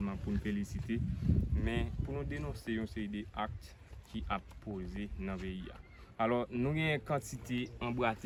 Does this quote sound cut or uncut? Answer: uncut